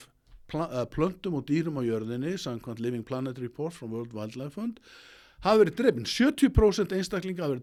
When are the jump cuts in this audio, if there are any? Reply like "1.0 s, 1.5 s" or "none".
none